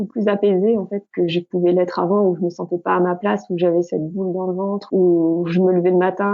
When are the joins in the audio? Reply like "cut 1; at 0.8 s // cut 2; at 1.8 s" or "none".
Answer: cut 1; at 1.1 s // cut 2; at 4.8 s